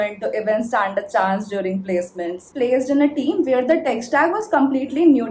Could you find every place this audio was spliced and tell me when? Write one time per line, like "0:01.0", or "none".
0:02.5